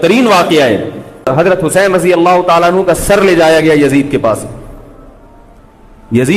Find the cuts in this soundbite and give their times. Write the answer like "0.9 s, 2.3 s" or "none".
1.3 s